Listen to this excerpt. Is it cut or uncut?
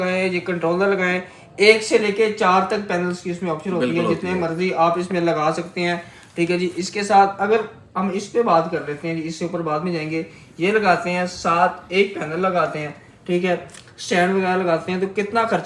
uncut